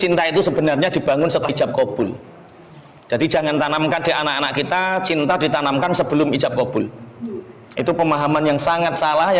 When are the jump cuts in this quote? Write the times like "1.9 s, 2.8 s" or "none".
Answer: 1.5 s